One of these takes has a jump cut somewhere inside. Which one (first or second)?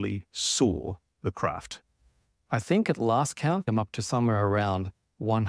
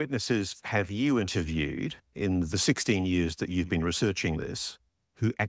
first